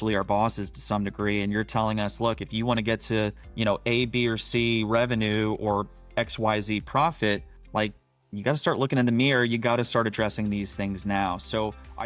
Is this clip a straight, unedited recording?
yes; 0 cuts

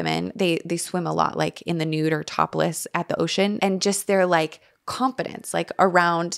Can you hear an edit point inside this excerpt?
yes; 1 cut; at 3.6 s

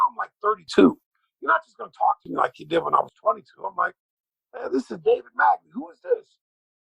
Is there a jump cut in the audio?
no; 0 cuts

